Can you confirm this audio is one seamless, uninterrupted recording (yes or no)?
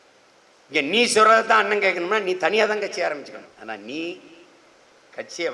no